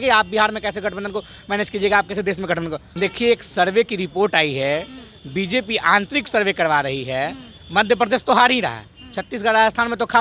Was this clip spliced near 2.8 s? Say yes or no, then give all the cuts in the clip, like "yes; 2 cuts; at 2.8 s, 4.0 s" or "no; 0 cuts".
yes; 1 cut; at 2.8 s